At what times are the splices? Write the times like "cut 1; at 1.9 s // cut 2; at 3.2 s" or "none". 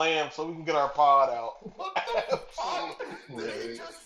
none